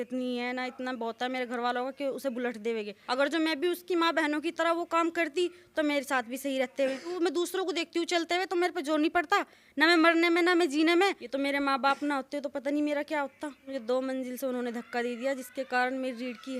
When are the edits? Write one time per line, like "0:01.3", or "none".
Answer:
0:03.0
0:07.1
0:11.2
0:13.7